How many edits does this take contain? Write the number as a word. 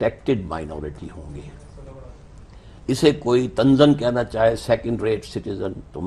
zero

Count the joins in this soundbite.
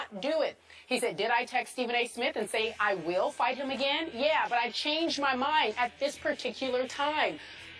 zero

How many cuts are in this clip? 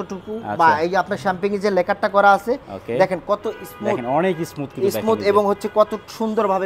zero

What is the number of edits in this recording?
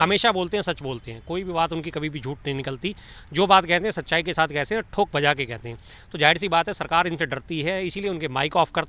zero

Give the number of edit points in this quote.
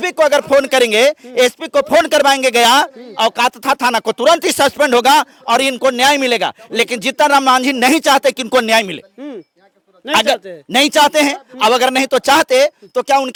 zero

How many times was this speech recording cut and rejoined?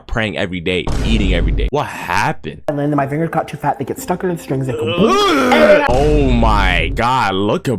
two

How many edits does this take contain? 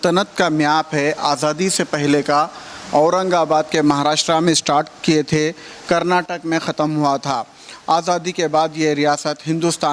zero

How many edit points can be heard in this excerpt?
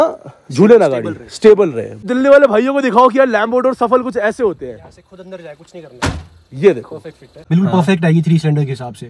two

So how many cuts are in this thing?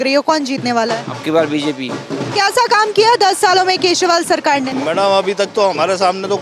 two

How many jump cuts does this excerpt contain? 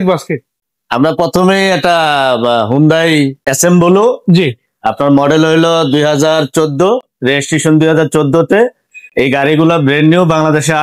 one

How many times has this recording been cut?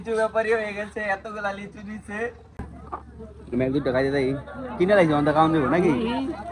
one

